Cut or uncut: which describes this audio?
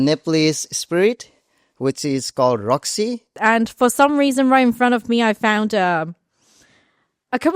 cut